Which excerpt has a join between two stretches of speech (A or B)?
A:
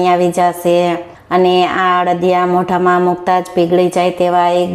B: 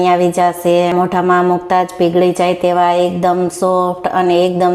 B